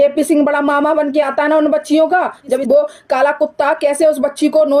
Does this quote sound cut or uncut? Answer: cut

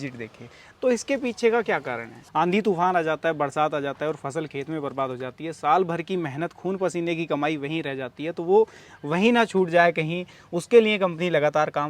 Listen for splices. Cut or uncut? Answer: cut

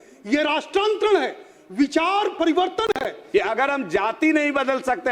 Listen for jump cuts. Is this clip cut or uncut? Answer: cut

